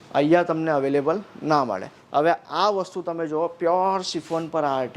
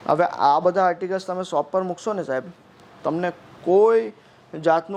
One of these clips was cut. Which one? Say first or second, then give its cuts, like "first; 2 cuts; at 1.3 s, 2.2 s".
first; 1 cut; at 1.9 s